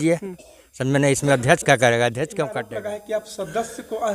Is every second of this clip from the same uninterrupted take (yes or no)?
no